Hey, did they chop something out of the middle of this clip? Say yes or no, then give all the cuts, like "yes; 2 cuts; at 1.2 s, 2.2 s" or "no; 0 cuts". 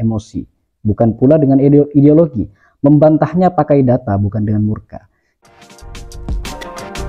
yes; 1 cut; at 5.3 s